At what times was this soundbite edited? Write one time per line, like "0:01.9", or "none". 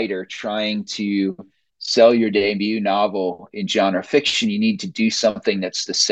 none